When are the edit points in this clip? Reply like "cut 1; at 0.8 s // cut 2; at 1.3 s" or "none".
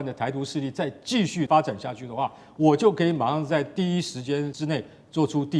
cut 1; at 1.5 s // cut 2; at 4.5 s

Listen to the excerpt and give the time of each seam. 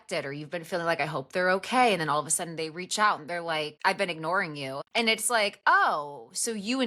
cut 1; at 3.7 s // cut 2; at 4.8 s

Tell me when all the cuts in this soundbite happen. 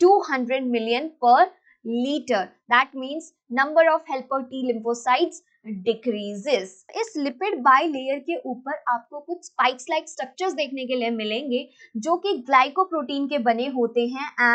cut 1; at 6.9 s

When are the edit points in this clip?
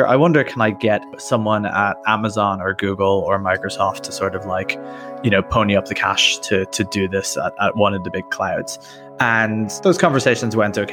none

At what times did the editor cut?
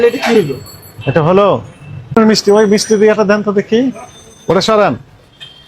cut 1; at 2.1 s

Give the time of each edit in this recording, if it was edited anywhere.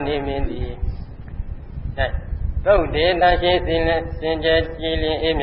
cut 1; at 1.8 s

